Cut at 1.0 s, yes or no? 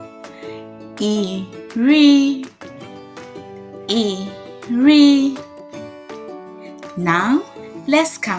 no